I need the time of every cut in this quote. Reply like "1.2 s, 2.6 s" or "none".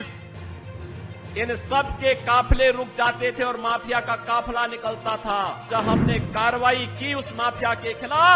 5.7 s